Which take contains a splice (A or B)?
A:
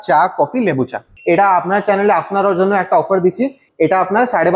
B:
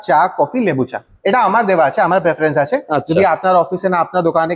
A